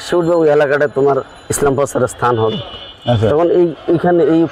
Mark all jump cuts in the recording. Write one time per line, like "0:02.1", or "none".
none